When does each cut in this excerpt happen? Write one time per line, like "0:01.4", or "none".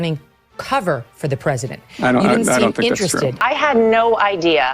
0:03.4